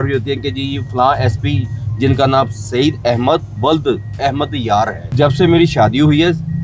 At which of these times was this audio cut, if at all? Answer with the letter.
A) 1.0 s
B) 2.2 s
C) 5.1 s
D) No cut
C